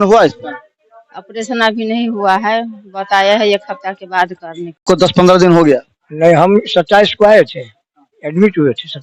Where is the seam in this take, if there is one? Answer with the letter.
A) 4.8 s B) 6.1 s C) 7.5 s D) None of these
A